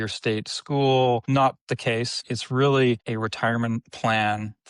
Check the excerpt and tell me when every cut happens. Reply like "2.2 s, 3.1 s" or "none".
1.2 s, 2.2 s, 3.1 s